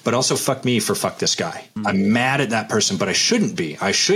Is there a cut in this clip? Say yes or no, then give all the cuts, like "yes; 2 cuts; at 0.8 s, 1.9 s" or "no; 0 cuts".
yes; 1 cut; at 1.7 s